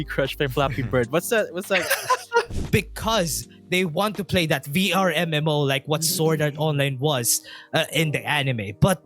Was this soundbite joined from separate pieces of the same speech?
yes; 1 cut; at 2.5 s

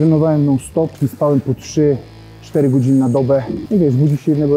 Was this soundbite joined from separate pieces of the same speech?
yes; 2 cuts; at 1.0 s, 3.6 s

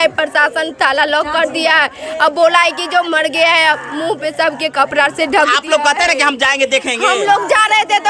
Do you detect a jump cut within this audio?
no; 0 cuts

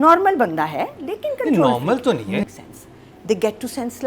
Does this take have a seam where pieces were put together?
yes; 1 cut; at 2.4 s

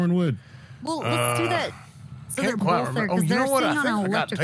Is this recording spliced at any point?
no; 0 cuts

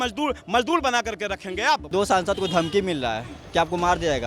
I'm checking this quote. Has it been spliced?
yes; 1 cut; at 1.9 s

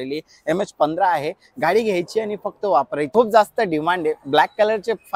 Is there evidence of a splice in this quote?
yes; 1 cut; at 3.1 s

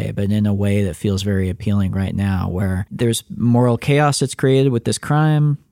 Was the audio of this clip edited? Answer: yes; 1 cut; at 2.9 s

